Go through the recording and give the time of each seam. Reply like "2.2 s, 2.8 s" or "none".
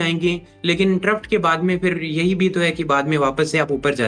none